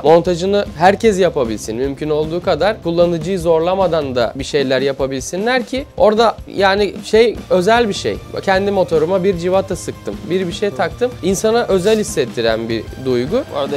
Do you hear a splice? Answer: no; 0 cuts

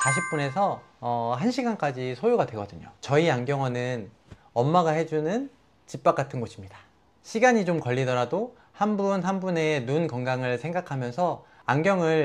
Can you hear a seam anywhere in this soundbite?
yes; 1 cut; at 2.9 s

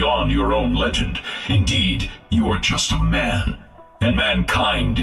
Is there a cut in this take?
no; 0 cuts

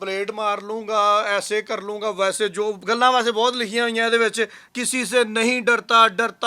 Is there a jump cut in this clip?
no; 0 cuts

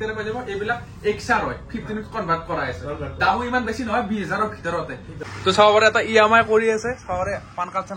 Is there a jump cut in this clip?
yes; 1 cut; at 5.2 s

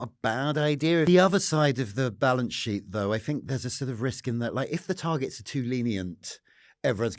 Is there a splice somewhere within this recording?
yes; 1 cut; at 1.1 s

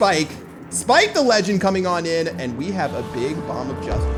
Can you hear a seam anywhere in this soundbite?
no; 0 cuts

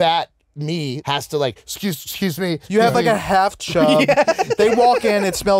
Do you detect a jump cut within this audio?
yes; 2 cuts; at 1.0 s, 2.6 s

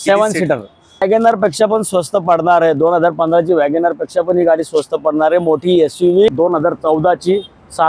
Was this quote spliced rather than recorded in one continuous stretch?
yes; 2 cuts; at 1.0 s, 6.3 s

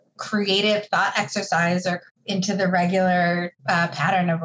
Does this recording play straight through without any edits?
no; 2 cuts; at 2.1 s, 3.5 s

